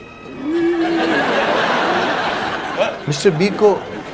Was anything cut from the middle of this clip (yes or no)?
yes